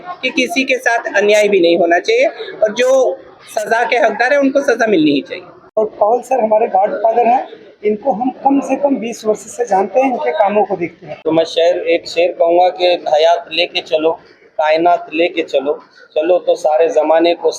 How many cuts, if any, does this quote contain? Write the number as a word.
two